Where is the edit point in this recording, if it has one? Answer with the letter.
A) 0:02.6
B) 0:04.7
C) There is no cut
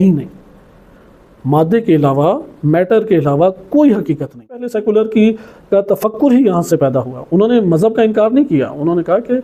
B